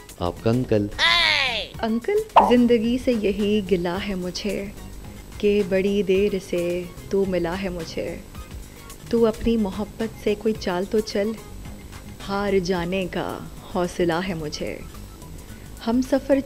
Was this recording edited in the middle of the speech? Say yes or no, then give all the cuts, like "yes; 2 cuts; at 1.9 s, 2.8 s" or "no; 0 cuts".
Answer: yes; 1 cut; at 2.3 s